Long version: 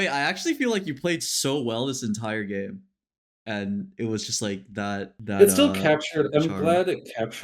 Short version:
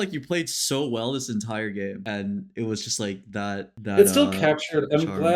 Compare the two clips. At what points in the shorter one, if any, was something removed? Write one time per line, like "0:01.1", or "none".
0:02.0